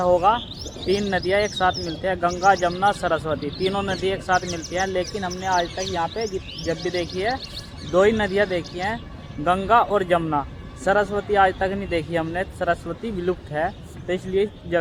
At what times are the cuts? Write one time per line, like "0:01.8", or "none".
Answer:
none